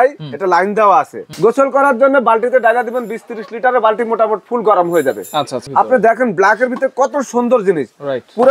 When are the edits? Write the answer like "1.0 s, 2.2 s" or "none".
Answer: 1.2 s, 5.6 s